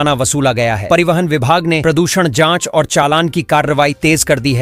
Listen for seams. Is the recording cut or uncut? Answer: uncut